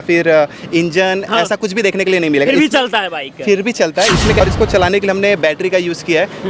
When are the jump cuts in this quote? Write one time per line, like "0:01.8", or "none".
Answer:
0:04.4